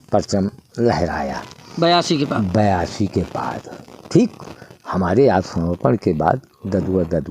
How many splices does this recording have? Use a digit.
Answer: 0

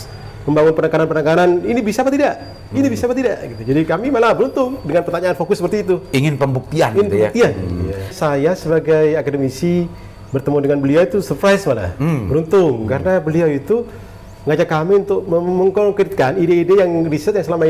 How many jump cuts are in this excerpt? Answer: 1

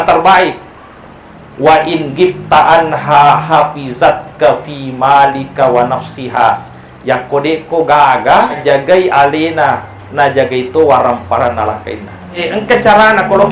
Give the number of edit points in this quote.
2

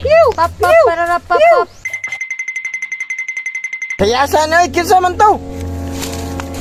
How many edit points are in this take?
1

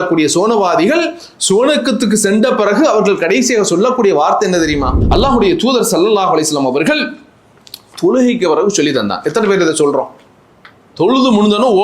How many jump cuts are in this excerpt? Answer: 1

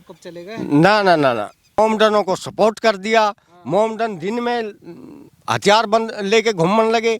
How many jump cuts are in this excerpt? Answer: 1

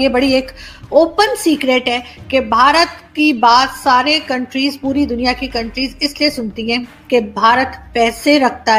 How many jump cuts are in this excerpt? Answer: 0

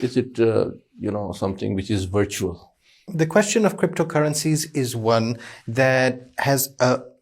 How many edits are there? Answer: 1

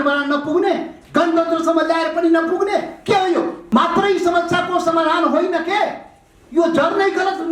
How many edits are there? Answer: 1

